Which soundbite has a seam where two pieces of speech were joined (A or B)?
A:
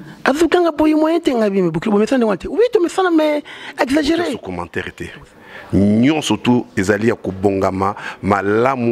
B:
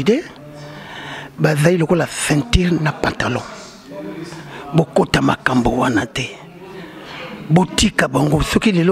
A